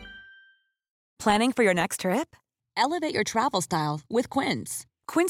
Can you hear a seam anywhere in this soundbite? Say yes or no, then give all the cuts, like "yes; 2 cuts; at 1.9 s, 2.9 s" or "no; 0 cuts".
yes; 1 cut; at 1.1 s